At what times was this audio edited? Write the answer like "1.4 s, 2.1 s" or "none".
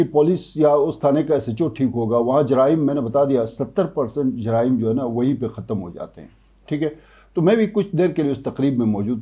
none